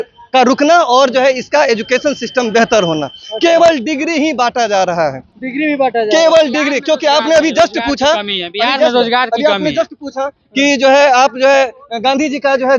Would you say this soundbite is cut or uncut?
uncut